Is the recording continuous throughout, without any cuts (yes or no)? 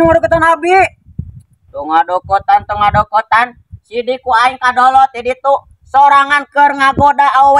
yes